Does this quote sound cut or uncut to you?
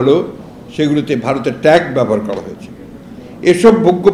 uncut